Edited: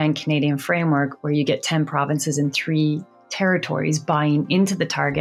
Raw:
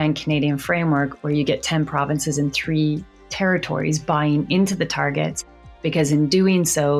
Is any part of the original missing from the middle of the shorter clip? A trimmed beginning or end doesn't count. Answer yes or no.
no